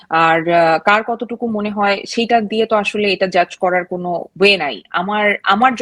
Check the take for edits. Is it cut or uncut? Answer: uncut